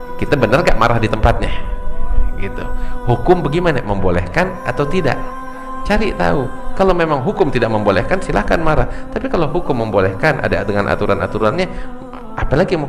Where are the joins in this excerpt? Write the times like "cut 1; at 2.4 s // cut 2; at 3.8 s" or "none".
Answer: none